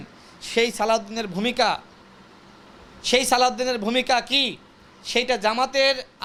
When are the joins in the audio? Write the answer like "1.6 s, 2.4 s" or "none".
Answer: none